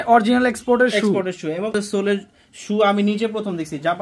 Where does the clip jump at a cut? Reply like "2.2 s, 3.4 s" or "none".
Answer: 1.7 s